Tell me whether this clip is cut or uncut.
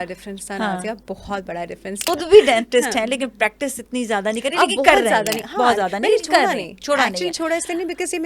cut